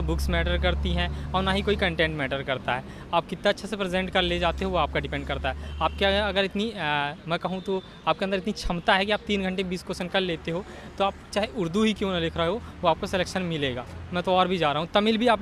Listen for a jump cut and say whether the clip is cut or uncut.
uncut